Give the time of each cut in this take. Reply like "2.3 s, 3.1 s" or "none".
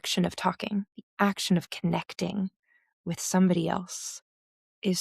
1.0 s